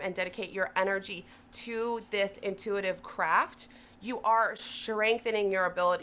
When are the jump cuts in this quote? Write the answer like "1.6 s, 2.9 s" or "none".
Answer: none